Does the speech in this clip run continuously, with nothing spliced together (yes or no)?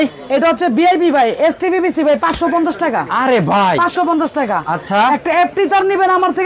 yes